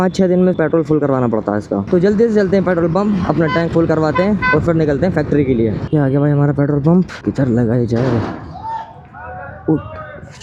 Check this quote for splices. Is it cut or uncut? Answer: uncut